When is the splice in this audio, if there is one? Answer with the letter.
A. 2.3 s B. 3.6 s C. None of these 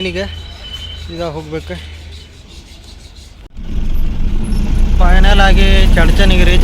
B